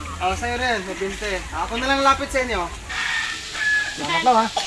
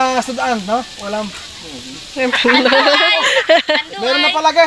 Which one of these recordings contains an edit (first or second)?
first